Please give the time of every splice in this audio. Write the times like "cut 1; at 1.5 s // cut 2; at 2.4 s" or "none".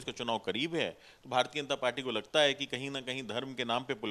none